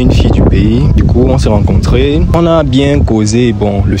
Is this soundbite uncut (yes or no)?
no